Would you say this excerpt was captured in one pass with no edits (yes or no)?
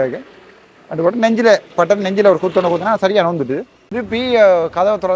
no